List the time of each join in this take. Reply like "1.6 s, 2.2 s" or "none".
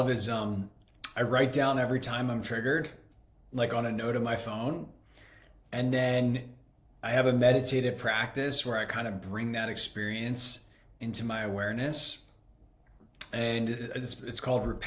none